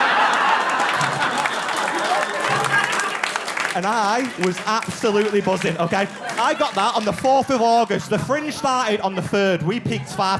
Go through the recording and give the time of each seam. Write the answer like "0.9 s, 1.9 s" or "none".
1.0 s, 2.5 s